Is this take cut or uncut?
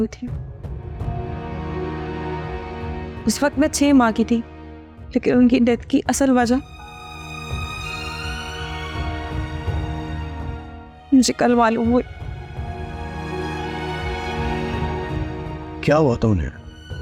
uncut